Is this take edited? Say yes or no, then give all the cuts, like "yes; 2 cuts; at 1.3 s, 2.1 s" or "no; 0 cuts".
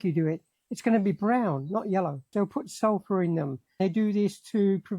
yes; 2 cuts; at 2.3 s, 3.8 s